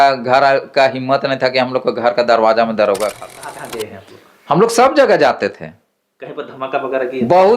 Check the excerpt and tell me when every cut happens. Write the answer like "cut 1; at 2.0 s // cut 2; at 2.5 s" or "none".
cut 1; at 3.1 s